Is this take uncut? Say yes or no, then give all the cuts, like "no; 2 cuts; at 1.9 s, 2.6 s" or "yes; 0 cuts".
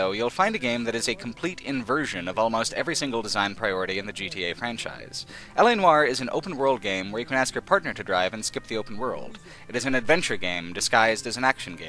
no; 1 cut; at 8.3 s